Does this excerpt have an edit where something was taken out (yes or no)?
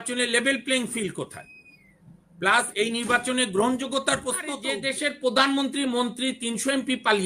yes